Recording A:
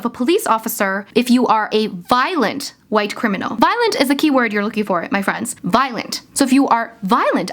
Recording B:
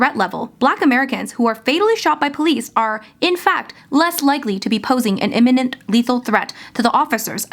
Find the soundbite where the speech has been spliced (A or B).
A